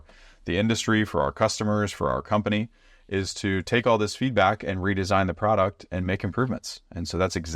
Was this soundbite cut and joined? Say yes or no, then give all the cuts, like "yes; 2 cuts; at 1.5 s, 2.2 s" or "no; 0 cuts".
no; 0 cuts